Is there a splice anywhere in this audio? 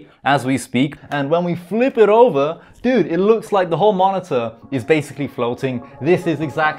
yes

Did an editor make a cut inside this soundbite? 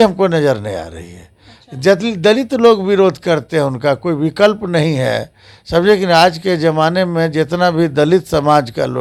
no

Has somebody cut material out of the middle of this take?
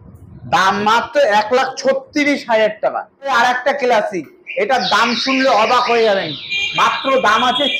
yes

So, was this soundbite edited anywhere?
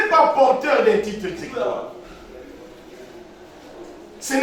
no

